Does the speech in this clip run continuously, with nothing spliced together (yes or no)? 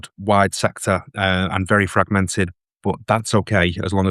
yes